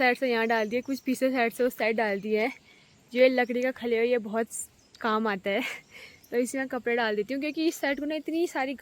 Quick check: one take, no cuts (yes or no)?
yes